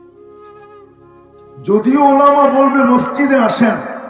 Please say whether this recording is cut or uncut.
cut